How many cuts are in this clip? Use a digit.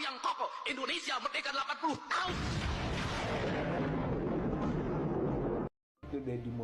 1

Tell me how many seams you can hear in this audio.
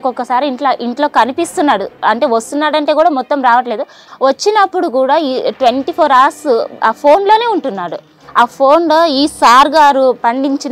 2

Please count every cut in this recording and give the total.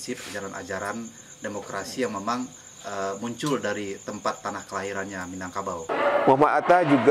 1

